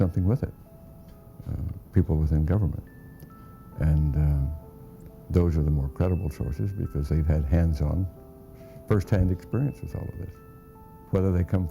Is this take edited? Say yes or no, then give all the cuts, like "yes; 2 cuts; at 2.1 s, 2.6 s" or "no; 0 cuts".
yes; 1 cut; at 3.5 s